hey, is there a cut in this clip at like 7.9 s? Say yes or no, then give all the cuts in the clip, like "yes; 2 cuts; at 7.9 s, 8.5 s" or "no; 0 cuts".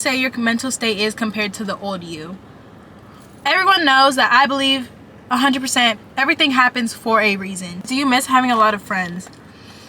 yes; 2 cuts; at 3.3 s, 7.9 s